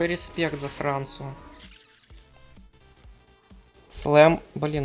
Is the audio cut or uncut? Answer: cut